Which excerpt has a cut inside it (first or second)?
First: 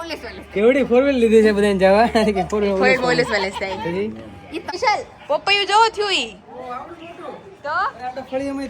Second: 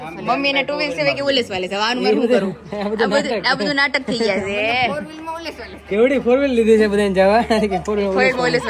first